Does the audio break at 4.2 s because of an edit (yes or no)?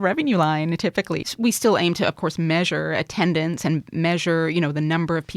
no